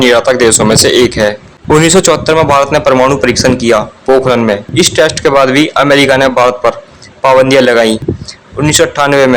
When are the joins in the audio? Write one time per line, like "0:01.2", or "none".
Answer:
0:04.6
0:08.1